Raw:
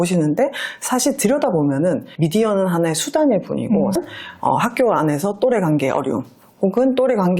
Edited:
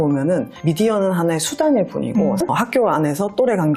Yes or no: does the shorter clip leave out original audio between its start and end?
yes